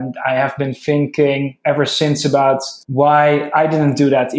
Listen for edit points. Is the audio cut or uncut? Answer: cut